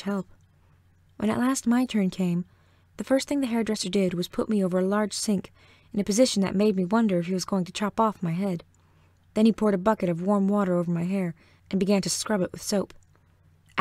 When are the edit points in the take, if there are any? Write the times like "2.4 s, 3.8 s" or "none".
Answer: none